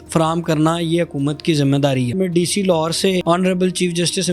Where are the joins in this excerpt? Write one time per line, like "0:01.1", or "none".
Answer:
0:02.1
0:03.2